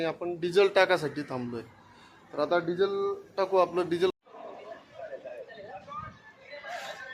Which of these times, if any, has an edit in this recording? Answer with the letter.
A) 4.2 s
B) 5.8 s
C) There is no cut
A